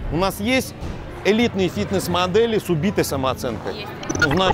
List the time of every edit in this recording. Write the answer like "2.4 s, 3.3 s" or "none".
none